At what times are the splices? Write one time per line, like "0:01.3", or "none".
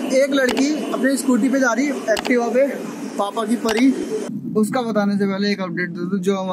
0:04.1